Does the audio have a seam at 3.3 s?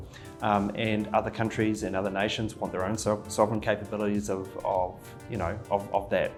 no; 0 cuts

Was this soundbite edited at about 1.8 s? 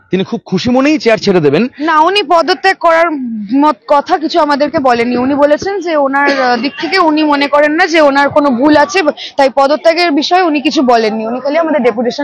yes; 1 cut; at 1.8 s

